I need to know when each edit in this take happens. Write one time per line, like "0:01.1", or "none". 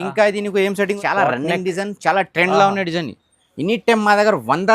0:01.0